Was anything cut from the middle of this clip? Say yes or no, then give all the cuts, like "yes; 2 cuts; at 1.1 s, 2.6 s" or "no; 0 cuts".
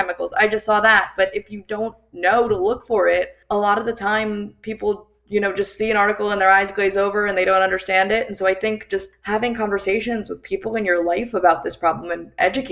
yes; 2 cuts; at 3.4 s, 9.1 s